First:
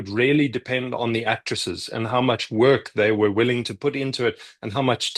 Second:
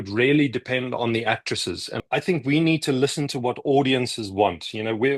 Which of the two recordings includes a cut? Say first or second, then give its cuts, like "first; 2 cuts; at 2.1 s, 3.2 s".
second; 1 cut; at 2.0 s